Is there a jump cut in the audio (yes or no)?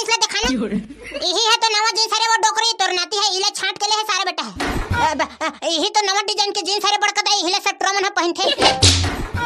yes